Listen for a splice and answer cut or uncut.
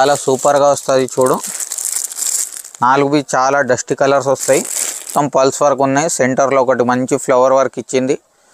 cut